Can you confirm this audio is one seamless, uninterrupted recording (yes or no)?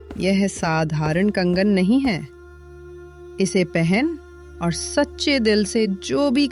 yes